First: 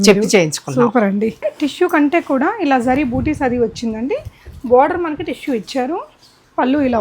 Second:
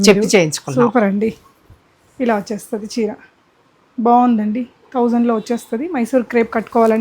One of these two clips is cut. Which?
first; 1 cut; at 1.5 s

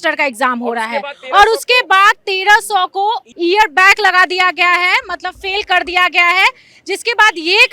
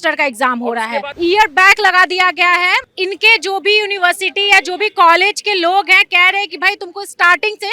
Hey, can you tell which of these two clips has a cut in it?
second; 2 cuts; at 1.1 s, 2.9 s

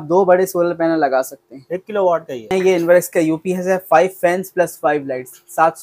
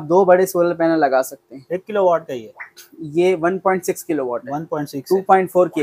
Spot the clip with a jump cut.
first; 1 cut; at 2.5 s

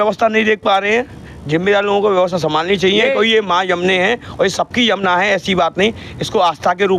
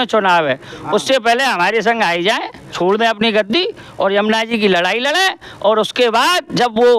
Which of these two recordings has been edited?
second; 1 cut; at 2.7 s

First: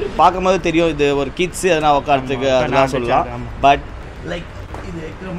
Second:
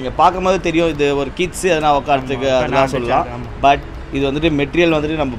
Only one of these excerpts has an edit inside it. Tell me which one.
first; 1 cut; at 4.0 s

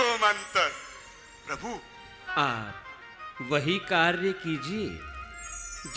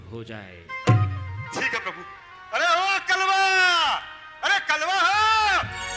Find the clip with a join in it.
first; 1 cut; at 2.2 s

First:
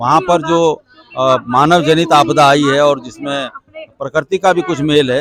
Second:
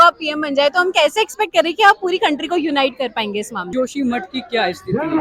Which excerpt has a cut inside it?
second; 1 cut; at 3.7 s

